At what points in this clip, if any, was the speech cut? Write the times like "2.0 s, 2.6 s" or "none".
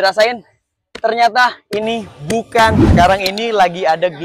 2.9 s